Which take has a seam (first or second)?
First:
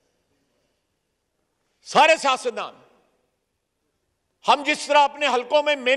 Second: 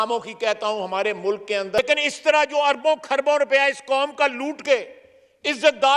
second